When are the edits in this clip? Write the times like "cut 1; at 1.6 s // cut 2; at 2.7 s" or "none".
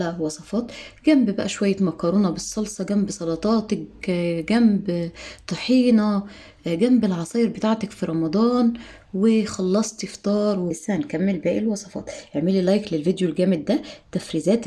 cut 1; at 10.8 s